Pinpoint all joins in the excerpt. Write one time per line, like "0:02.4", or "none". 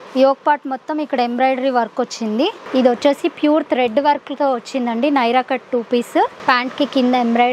0:02.6
0:06.4